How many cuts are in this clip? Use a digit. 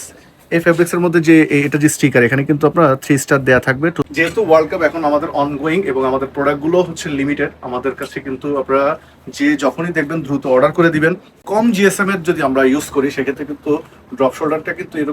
2